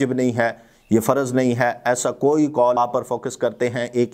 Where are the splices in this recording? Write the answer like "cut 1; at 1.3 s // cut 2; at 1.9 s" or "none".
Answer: cut 1; at 2.8 s